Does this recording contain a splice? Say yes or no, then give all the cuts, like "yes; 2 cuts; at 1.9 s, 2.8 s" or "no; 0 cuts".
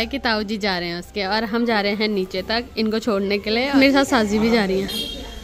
no; 0 cuts